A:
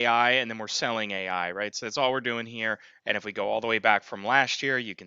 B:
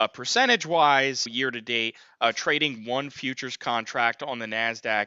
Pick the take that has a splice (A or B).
A